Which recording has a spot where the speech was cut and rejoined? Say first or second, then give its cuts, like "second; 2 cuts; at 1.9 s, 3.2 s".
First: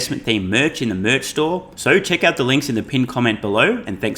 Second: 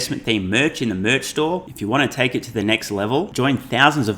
first; 1 cut; at 1.7 s